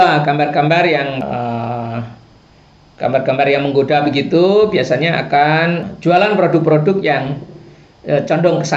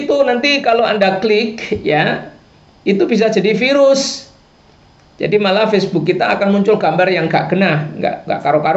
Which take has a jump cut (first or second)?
first